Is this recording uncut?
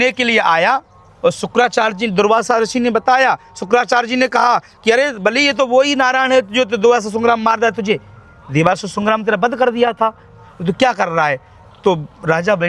yes; 0 cuts

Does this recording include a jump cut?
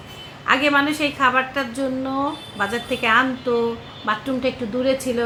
no; 0 cuts

